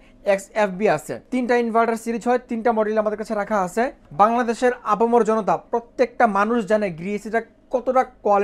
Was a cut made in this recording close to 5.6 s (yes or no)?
no